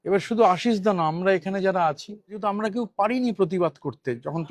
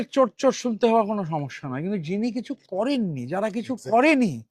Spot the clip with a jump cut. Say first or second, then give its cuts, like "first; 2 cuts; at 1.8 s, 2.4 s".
first; 1 cut; at 2.4 s